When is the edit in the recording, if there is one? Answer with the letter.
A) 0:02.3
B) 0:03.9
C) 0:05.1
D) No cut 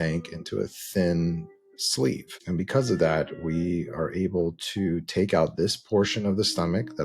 A